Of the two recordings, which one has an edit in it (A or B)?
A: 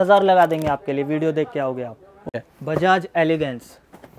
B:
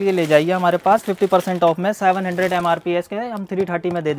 A